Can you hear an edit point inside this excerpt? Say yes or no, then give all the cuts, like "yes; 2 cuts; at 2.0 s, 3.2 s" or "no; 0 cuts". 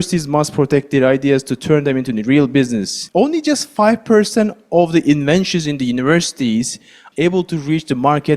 yes; 2 cuts; at 3.0 s, 7.0 s